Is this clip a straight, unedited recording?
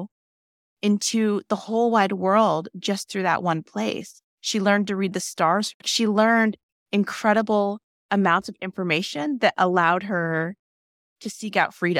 no; 2 cuts; at 5.7 s, 7.9 s

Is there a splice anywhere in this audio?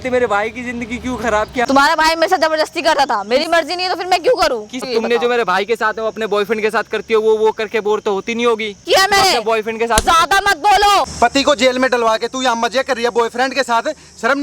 yes; 4 cuts; at 1.7 s, 4.9 s, 8.8 s, 11.1 s

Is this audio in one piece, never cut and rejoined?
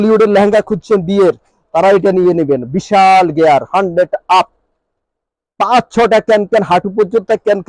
yes; 0 cuts

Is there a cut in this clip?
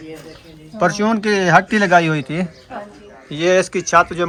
no; 0 cuts

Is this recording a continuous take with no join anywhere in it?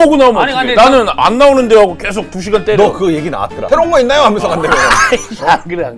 no; 1 cut; at 1.2 s

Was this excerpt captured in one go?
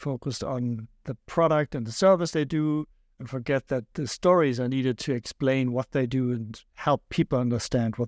yes; 0 cuts

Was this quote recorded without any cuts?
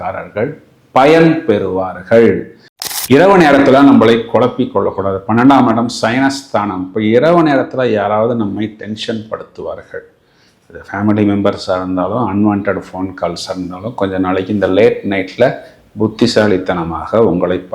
no; 1 cut; at 2.9 s

